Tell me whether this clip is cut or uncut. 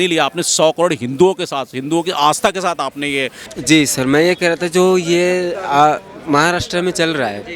cut